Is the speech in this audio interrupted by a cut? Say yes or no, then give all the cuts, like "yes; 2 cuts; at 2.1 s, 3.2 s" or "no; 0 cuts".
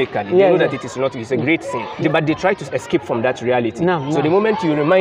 yes; 1 cut; at 1.8 s